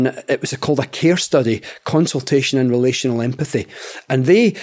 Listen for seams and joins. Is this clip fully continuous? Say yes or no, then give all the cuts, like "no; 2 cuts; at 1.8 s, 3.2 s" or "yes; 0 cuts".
yes; 0 cuts